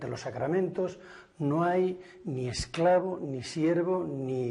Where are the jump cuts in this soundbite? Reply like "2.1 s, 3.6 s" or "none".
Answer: 3.3 s